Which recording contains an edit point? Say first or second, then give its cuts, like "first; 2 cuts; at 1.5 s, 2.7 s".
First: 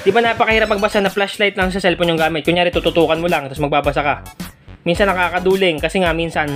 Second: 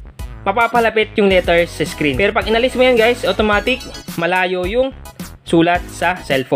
second; 1 cut; at 2.1 s